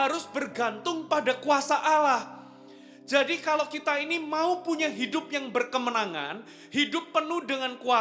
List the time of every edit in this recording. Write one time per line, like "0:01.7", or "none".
none